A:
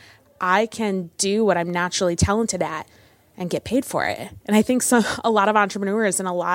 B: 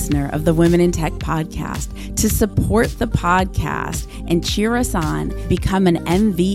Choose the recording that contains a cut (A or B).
A